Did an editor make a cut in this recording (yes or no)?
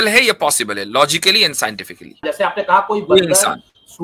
yes